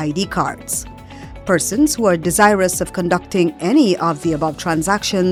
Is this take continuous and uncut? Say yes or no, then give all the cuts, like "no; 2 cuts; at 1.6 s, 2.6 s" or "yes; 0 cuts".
yes; 0 cuts